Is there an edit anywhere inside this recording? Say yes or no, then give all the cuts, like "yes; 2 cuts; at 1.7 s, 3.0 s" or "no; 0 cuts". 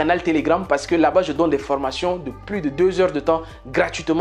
no; 0 cuts